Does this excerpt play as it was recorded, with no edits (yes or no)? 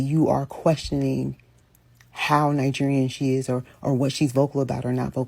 yes